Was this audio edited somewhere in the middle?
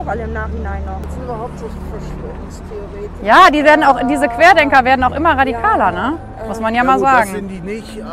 yes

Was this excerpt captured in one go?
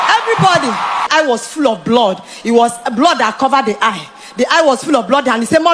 no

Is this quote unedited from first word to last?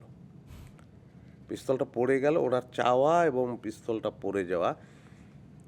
yes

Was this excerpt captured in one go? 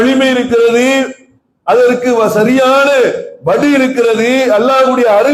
yes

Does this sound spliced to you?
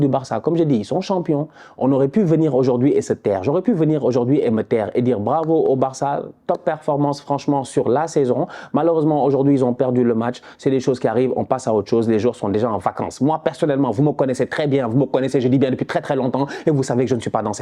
no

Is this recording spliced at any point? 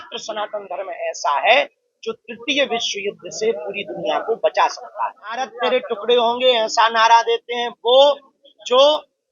yes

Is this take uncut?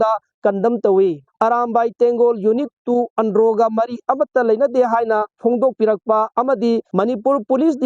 no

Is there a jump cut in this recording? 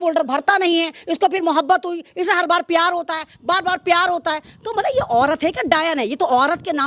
no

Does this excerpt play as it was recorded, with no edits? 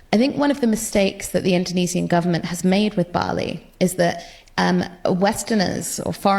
yes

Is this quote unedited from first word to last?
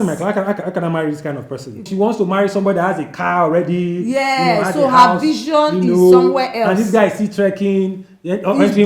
no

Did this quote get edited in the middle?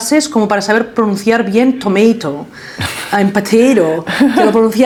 no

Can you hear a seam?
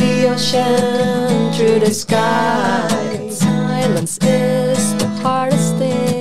no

